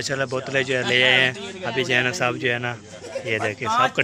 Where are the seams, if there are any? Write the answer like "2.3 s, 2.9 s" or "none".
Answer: none